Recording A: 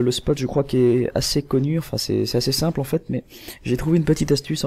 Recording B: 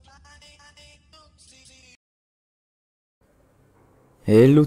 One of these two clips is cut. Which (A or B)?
A